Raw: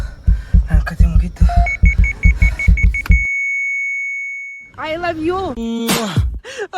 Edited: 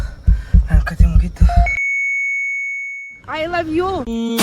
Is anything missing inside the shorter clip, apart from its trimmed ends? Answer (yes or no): yes